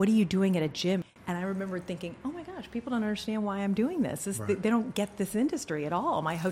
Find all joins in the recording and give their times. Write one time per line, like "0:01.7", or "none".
0:01.0